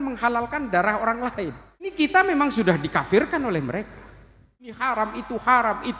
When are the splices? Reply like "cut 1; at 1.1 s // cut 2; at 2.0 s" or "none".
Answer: cut 1; at 2.1 s // cut 2; at 4.8 s